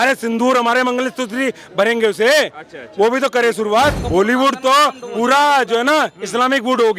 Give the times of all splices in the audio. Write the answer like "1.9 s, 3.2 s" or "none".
4.0 s